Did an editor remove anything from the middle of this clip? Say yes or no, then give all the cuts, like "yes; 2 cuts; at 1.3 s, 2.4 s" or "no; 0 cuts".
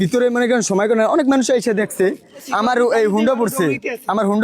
yes; 1 cut; at 2.5 s